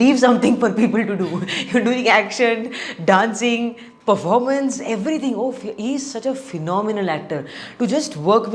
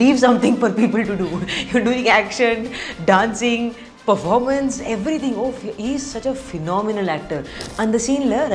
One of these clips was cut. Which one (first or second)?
second